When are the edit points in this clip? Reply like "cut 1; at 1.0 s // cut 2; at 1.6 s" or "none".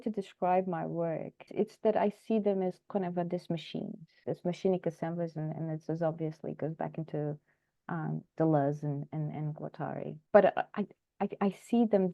cut 1; at 1.5 s // cut 2; at 4.2 s // cut 3; at 10.2 s